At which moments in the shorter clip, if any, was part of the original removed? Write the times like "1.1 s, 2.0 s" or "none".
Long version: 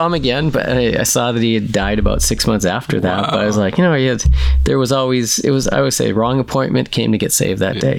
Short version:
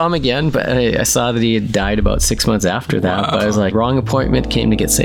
3.7 s